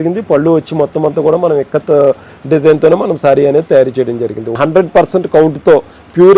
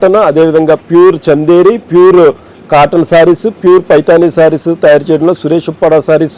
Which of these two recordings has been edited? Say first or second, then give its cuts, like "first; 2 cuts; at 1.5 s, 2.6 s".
first; 1 cut; at 4.6 s